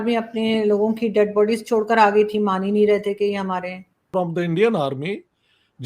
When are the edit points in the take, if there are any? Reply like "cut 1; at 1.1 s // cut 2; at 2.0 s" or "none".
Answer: cut 1; at 3.9 s